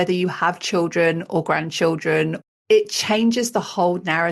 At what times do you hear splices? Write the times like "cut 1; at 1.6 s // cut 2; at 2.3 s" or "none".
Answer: cut 1; at 2.5 s